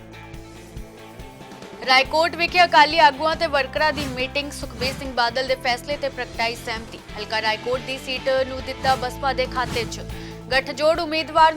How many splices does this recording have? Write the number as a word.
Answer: one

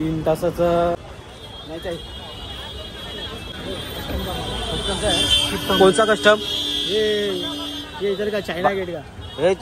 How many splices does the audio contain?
two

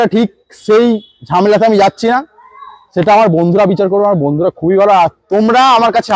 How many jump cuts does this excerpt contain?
zero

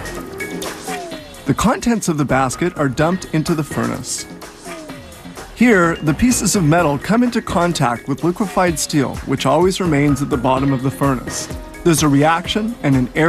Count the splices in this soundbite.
zero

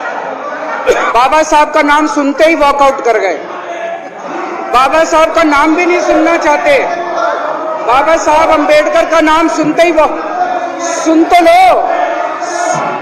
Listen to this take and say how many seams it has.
one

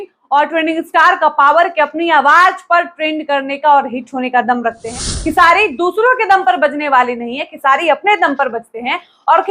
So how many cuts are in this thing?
one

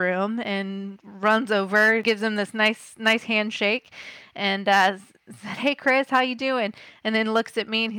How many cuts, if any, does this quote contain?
one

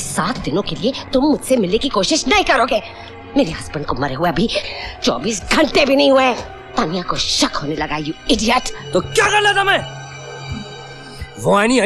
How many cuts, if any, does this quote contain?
zero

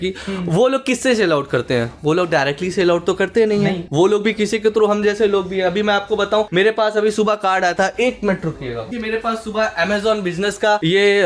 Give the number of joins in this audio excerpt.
zero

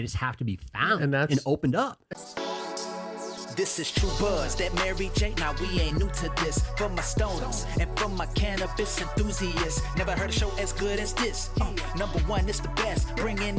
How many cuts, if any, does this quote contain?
one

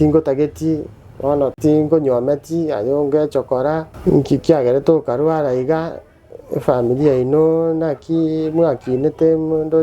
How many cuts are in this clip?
two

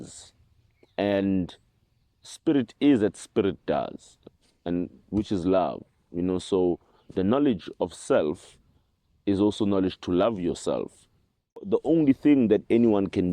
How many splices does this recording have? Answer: one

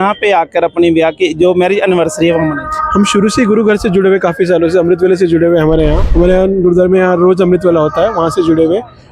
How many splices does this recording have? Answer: one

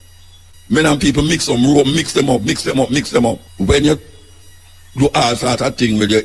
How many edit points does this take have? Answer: one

